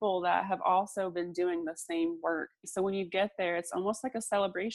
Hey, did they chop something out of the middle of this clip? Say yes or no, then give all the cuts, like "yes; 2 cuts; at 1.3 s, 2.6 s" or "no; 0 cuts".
yes; 1 cut; at 2.6 s